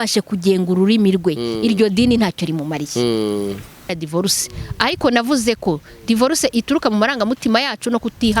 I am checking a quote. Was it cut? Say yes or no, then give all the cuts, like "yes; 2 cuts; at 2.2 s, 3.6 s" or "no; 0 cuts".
yes; 1 cut; at 3.9 s